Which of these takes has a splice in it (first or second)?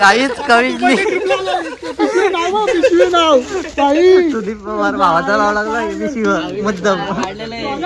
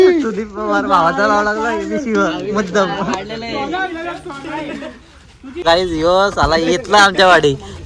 second